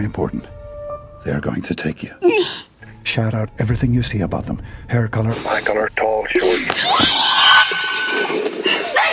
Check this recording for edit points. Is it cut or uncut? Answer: cut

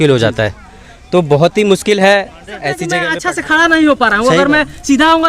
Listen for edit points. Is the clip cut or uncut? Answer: cut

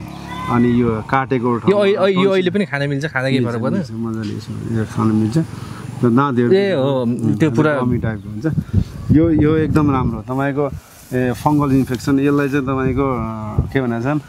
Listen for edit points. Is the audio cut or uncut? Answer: uncut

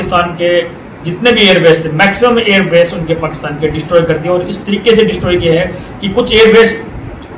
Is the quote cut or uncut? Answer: uncut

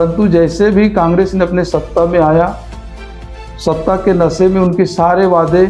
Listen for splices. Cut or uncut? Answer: uncut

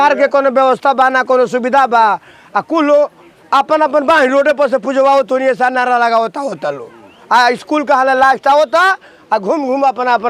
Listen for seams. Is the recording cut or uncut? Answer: uncut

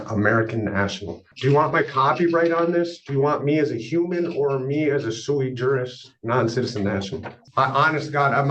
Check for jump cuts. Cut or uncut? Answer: cut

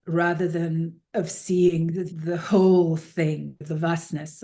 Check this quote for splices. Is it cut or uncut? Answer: cut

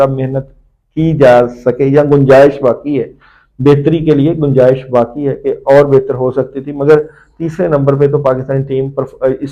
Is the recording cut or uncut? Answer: uncut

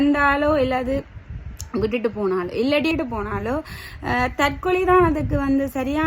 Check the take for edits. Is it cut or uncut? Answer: cut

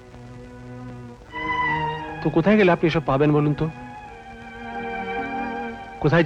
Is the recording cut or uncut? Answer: uncut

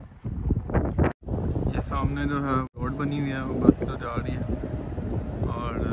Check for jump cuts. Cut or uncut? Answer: cut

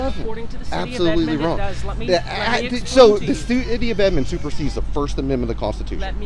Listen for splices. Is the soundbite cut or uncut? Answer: uncut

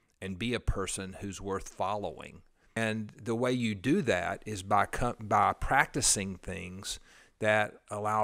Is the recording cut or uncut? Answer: cut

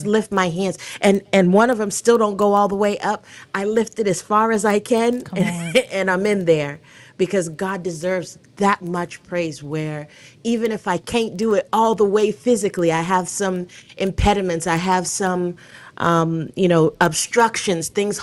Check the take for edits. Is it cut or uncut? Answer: uncut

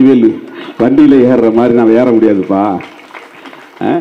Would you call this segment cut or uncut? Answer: uncut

